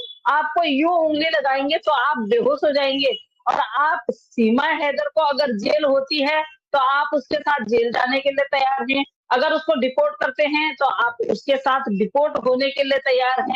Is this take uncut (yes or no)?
yes